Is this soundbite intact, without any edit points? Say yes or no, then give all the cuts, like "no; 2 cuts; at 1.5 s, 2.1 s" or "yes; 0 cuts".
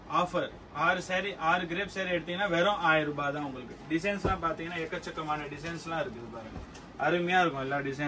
yes; 0 cuts